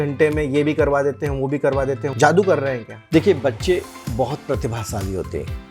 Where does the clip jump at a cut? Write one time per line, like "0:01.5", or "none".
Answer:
0:02.1
0:02.9